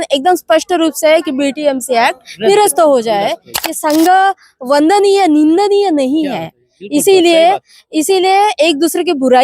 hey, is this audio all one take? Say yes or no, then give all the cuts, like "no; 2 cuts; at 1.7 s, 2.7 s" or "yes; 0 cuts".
no; 1 cut; at 3.5 s